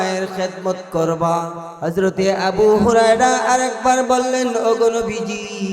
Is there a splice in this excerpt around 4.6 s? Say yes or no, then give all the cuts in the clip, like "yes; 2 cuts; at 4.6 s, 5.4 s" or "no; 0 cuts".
no; 1 cut; at 1.6 s